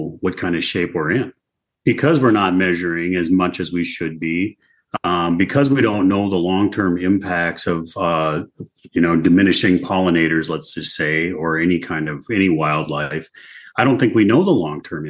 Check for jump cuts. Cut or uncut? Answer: cut